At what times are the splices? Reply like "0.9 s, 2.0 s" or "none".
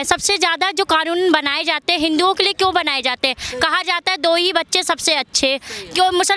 none